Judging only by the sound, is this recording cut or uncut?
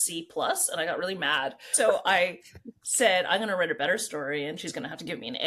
cut